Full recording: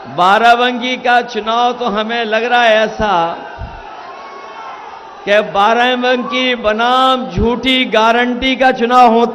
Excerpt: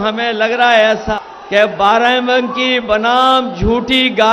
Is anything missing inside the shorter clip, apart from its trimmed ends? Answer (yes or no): yes